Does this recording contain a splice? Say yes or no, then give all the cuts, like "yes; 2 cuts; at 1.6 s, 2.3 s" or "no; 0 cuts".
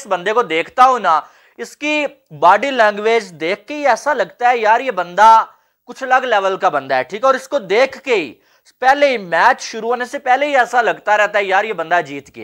no; 0 cuts